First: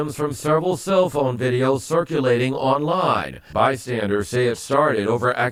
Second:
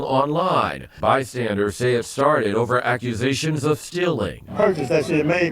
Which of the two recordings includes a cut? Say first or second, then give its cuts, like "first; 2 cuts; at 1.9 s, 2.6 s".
second; 1 cut; at 4.5 s